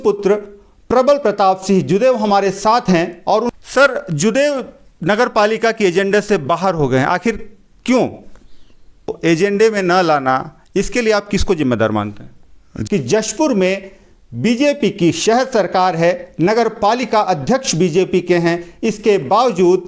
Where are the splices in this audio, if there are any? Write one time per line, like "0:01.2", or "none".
0:03.5
0:09.1
0:12.7